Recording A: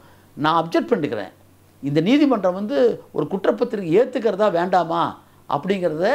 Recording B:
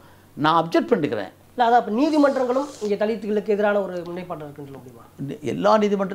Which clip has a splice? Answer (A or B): B